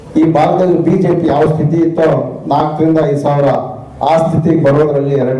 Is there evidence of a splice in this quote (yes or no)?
no